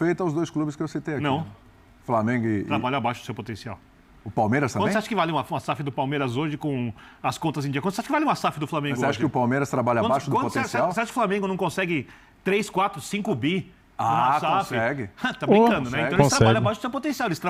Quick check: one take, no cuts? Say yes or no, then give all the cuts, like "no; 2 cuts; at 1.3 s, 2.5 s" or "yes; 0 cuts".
yes; 0 cuts